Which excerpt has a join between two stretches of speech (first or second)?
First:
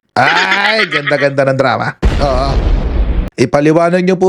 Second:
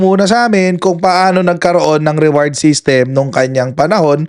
first